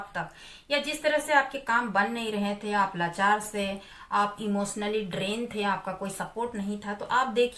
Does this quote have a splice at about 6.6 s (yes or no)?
no